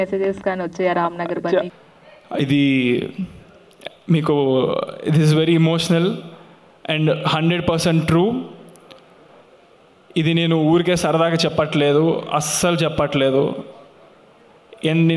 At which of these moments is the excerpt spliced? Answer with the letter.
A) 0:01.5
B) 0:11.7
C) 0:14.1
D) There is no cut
A